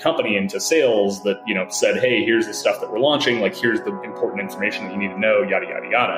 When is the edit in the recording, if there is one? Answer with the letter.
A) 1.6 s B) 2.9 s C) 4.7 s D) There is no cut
D